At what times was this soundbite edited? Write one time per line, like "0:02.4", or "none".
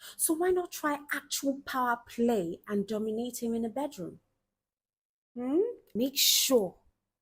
0:05.9

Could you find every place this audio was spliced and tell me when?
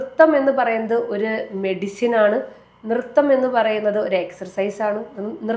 none

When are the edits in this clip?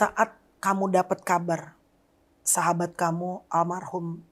0:02.4

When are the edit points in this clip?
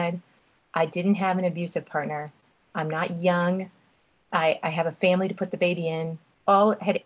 none

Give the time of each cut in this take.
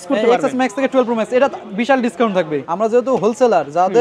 0:02.6

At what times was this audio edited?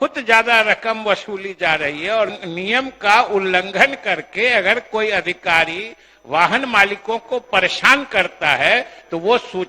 0:02.3

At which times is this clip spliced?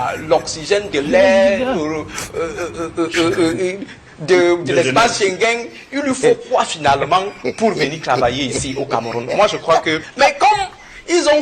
0:10.1

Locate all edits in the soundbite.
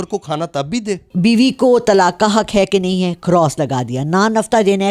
0:01.1

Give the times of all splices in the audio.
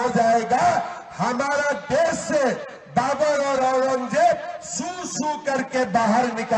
none

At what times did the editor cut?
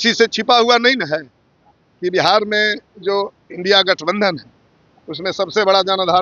none

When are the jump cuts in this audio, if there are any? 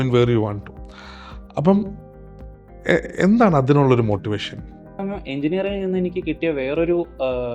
0:05.0

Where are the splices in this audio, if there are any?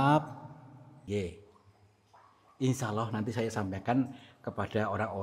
0:01.1

